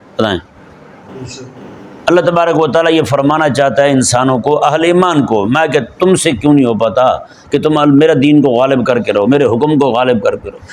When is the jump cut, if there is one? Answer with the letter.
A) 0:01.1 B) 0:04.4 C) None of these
A